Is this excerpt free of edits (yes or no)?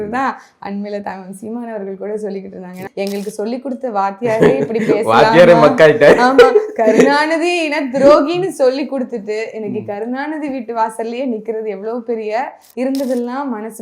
no